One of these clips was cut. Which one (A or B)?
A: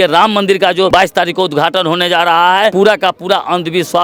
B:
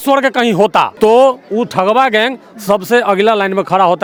A